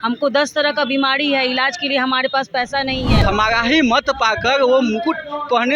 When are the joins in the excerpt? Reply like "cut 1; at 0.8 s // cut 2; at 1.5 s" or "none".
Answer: cut 1; at 3.1 s